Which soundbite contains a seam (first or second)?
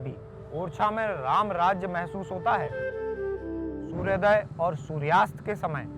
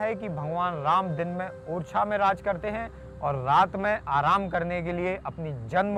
first